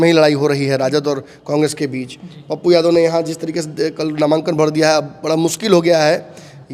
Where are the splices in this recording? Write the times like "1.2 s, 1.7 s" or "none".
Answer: none